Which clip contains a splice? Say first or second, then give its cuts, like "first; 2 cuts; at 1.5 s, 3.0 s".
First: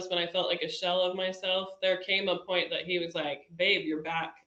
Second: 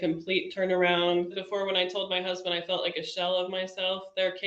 second; 1 cut; at 1.4 s